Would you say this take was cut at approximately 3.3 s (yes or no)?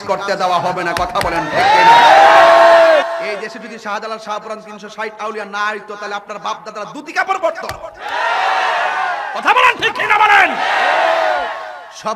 yes